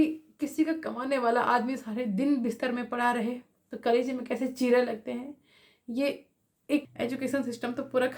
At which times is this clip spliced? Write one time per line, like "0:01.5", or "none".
0:06.8